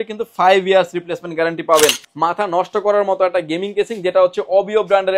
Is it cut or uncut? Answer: cut